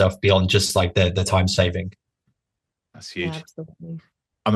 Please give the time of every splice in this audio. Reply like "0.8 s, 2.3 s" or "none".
none